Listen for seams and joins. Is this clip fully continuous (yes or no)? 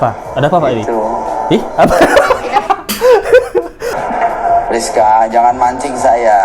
no